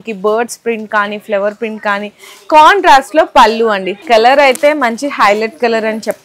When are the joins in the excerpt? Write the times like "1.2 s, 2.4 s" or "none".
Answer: 3.9 s